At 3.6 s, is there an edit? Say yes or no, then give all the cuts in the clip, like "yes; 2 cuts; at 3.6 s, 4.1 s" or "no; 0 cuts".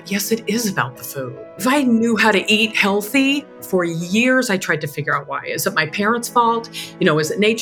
yes; 2 cuts; at 1.5 s, 3.6 s